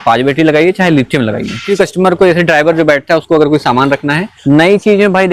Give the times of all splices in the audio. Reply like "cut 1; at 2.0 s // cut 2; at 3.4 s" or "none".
cut 1; at 1.7 s // cut 2; at 4.3 s